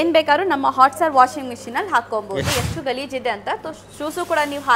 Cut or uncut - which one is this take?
cut